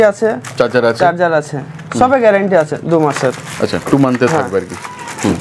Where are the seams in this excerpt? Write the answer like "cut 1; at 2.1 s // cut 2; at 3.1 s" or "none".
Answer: none